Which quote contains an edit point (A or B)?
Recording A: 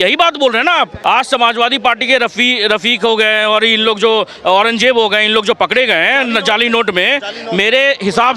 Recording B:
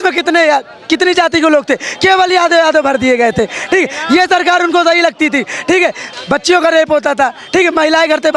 A